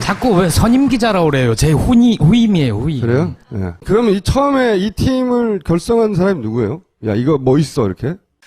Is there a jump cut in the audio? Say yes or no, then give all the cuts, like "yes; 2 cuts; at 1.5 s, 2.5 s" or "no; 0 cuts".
no; 0 cuts